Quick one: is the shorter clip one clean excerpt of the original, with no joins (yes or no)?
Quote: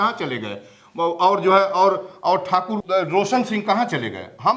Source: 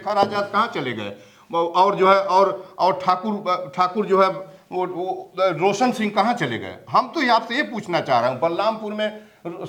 no